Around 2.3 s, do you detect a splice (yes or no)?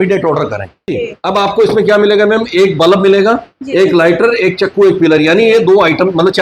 no